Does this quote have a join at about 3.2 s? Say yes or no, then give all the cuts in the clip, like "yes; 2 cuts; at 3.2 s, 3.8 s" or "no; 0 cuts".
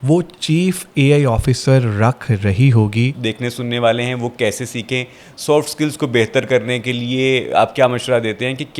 yes; 1 cut; at 3.2 s